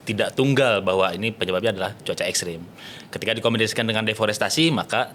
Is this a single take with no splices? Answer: yes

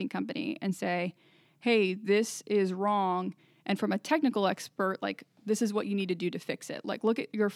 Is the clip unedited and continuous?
yes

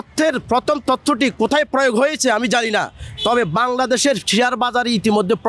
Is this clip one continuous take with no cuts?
yes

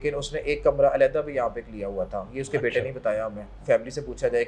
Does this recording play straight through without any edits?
no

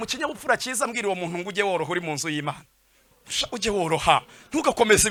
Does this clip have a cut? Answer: no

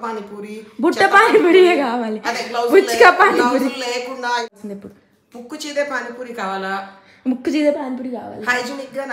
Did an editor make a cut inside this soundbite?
yes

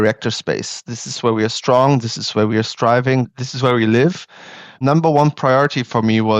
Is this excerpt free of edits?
no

